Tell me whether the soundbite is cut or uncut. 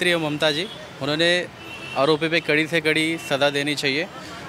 uncut